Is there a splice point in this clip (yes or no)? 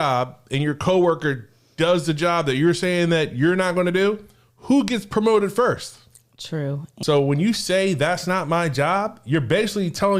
yes